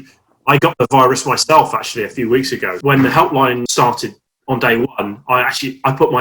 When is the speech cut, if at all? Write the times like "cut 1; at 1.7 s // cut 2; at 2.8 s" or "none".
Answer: cut 1; at 2.7 s // cut 2; at 3.7 s